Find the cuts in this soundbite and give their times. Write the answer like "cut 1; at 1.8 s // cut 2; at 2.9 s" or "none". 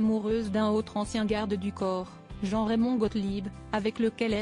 cut 1; at 3.2 s